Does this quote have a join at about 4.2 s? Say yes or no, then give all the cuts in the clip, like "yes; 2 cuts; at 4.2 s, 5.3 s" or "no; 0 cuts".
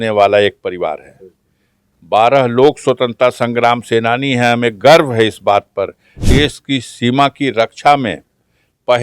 no; 1 cut; at 6.2 s